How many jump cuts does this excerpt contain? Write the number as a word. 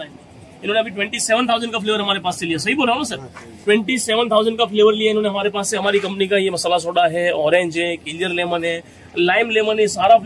zero